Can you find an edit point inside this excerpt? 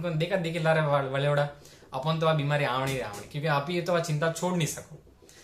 no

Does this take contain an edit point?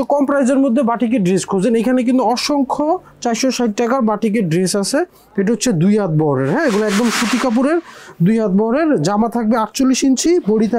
no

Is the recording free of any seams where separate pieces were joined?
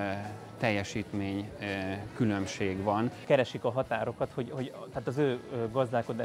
no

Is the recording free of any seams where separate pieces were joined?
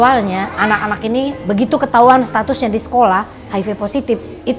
no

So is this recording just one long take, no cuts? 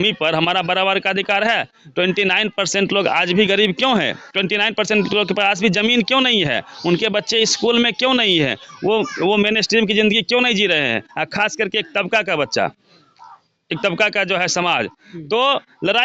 yes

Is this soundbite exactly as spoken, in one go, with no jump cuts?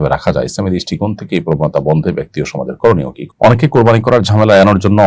no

